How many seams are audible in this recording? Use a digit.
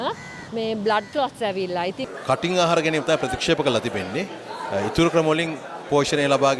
1